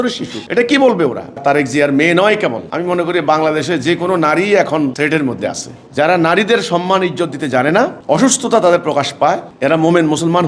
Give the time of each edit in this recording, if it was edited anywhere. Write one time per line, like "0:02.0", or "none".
0:01.4
0:05.8